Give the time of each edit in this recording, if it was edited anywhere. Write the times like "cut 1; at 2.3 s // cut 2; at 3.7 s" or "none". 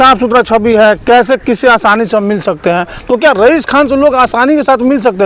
none